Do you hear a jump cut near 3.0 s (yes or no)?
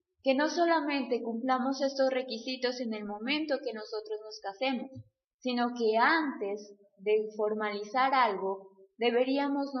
yes